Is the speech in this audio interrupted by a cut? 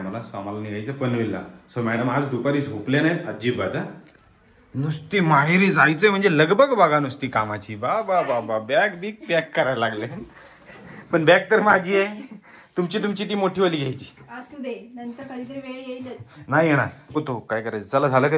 yes; 1 cut; at 17.0 s

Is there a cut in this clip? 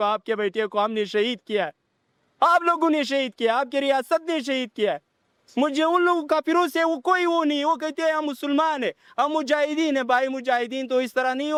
no; 0 cuts

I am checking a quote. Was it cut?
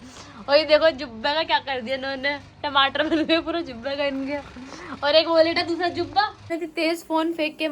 yes; 1 cut; at 6.5 s

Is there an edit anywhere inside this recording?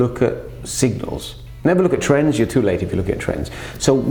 no; 0 cuts

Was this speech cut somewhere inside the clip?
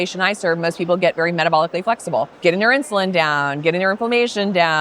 yes; 1 cut; at 2.3 s

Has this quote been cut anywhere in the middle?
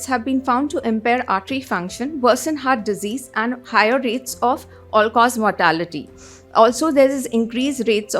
no; 0 cuts

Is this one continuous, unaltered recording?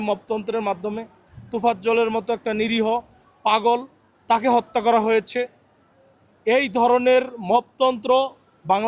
yes; 0 cuts

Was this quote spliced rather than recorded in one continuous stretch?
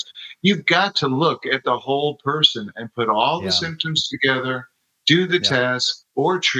no; 0 cuts

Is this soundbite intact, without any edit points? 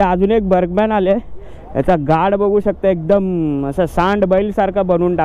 yes; 0 cuts

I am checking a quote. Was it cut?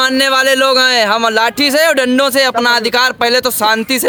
no; 0 cuts

